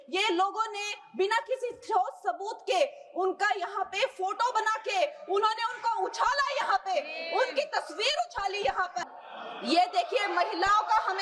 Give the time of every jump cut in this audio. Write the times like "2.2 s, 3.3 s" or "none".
9.1 s